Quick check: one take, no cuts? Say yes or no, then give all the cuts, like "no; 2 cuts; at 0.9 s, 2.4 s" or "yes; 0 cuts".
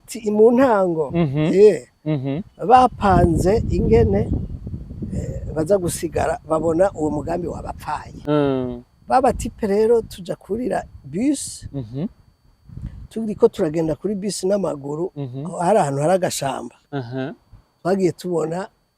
no; 1 cut; at 8.1 s